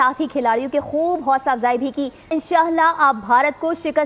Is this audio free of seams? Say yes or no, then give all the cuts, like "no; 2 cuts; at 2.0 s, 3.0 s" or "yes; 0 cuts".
no; 1 cut; at 2.3 s